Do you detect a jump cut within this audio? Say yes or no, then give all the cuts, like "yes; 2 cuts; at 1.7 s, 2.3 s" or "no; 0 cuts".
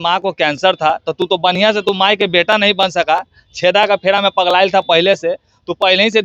no; 0 cuts